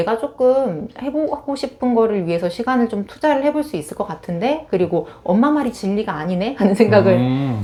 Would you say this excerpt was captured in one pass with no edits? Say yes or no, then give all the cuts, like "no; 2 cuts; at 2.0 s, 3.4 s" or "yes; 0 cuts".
yes; 0 cuts